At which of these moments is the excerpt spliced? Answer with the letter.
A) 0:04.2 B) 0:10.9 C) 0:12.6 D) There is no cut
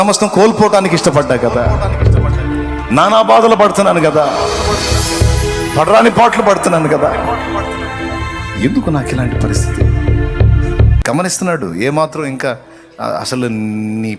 B